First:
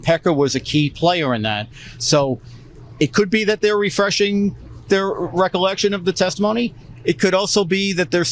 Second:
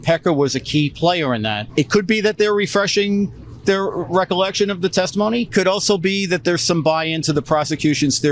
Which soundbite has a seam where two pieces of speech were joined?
second; 2 cuts; at 1.6 s, 5.5 s

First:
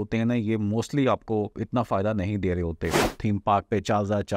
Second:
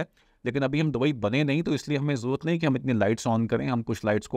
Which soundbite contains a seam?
first; 2 cuts; at 1.6 s, 3.1 s

